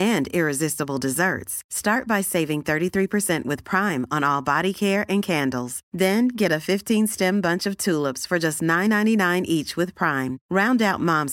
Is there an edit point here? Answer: no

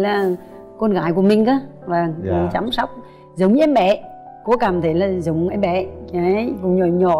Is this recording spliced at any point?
no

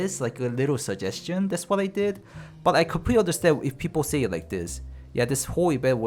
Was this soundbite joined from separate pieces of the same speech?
no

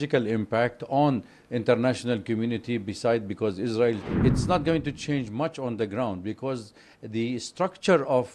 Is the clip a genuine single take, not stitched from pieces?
no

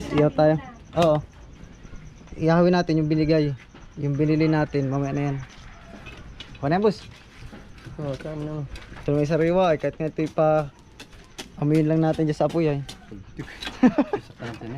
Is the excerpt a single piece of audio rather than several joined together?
yes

